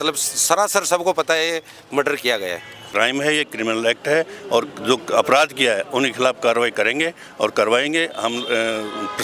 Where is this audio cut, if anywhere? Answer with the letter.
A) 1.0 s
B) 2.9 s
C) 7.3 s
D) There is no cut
B